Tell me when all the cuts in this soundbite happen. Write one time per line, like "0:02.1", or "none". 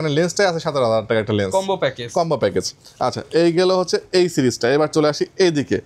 none

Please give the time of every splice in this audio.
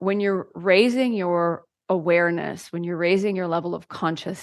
none

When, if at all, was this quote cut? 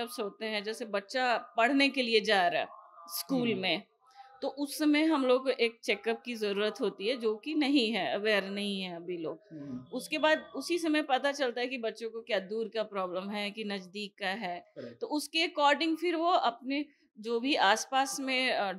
none

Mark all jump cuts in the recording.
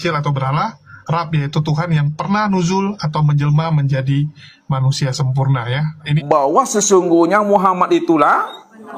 0:06.1

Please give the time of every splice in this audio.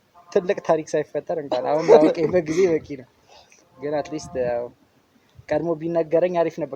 none

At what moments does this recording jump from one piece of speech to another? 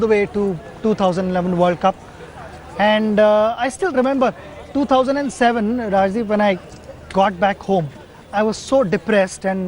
0:05.9

